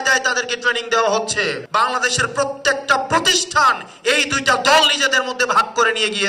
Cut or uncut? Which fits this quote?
cut